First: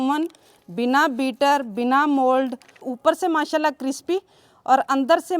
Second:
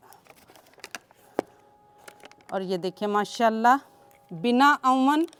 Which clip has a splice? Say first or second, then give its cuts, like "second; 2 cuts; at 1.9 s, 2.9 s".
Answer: first; 1 cut; at 2.8 s